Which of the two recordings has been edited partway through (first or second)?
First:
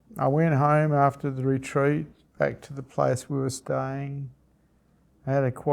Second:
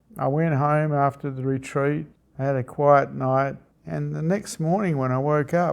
second